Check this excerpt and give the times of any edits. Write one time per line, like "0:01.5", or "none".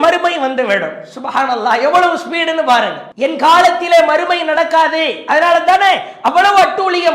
0:03.0